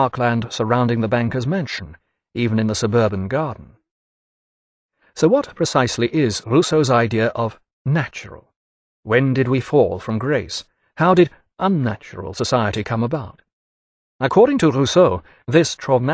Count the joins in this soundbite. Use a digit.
1